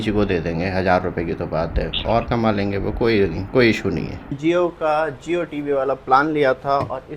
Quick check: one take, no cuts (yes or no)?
no